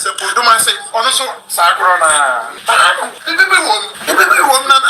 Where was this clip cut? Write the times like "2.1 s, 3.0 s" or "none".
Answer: 2.5 s, 3.2 s, 3.9 s